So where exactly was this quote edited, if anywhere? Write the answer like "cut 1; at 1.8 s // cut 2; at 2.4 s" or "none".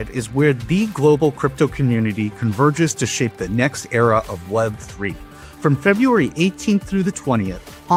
none